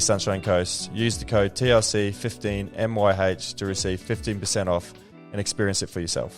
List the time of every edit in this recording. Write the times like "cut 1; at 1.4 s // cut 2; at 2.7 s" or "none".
none